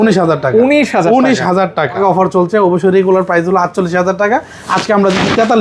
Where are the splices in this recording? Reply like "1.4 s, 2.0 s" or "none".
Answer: 2.0 s